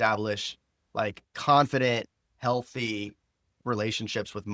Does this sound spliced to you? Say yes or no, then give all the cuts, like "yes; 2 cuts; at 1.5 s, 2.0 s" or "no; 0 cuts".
yes; 1 cut; at 3.6 s